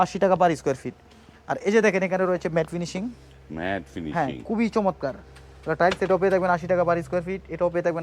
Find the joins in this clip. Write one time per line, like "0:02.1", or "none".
none